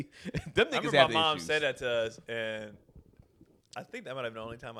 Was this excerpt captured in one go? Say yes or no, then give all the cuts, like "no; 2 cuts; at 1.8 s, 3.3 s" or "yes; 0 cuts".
yes; 0 cuts